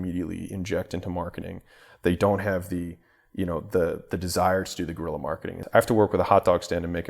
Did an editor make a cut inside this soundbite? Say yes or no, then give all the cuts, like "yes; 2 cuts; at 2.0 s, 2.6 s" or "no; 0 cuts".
yes; 1 cut; at 5.6 s